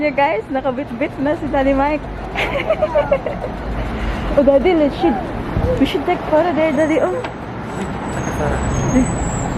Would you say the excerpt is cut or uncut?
uncut